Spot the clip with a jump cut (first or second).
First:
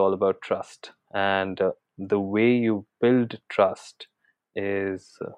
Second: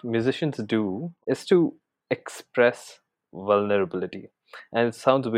second